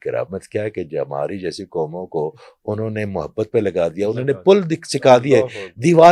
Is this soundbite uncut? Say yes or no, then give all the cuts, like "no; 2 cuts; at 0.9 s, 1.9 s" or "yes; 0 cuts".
yes; 0 cuts